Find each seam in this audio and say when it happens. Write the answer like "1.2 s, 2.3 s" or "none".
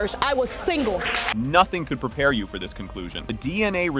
none

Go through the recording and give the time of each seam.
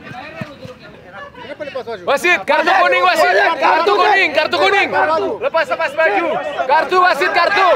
1.0 s

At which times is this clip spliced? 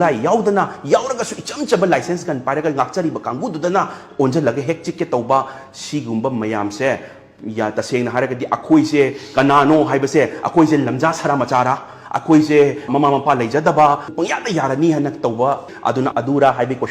none

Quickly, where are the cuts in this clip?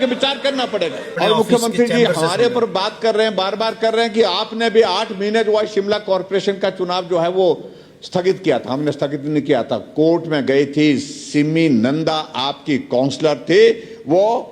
1.0 s

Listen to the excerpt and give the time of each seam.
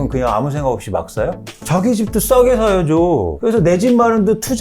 1.5 s, 3.3 s

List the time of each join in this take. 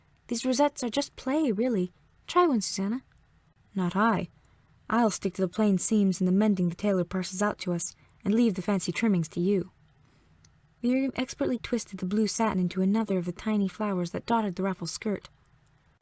9.7 s

